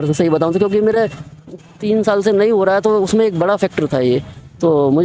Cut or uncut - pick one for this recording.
uncut